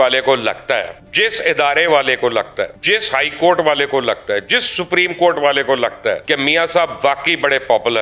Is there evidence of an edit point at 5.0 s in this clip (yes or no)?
no